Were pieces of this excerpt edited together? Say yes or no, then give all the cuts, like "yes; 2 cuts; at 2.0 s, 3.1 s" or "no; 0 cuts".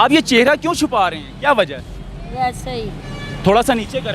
no; 0 cuts